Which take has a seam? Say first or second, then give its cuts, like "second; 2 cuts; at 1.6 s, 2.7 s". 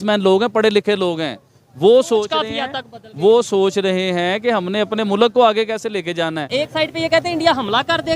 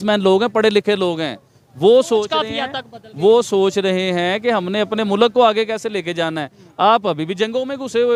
first; 1 cut; at 6.5 s